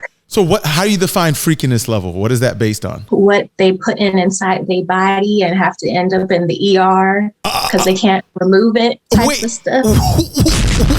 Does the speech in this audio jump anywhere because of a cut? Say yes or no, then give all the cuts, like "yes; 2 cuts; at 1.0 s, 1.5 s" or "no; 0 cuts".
yes; 1 cut; at 2.9 s